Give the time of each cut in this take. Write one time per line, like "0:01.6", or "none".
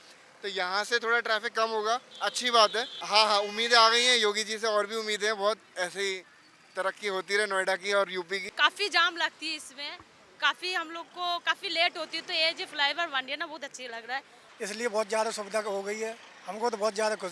0:03.0
0:08.5
0:14.4